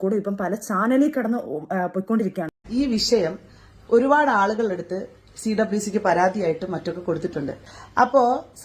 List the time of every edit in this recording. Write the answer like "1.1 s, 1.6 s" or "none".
2.6 s